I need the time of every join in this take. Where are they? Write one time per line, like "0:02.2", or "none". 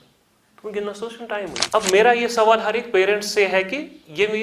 0:01.6